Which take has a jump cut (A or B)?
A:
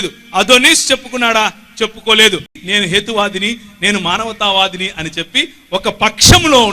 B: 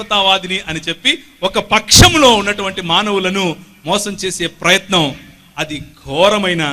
A